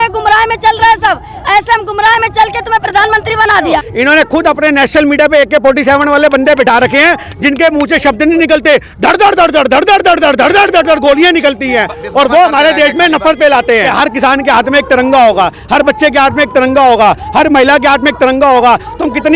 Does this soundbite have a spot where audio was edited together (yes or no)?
yes